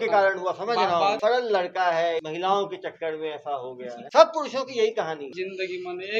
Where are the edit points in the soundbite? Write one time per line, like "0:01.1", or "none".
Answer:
0:01.2
0:02.3
0:04.0
0:05.3